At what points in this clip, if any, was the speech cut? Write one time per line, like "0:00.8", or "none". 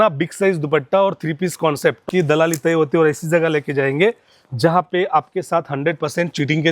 0:02.1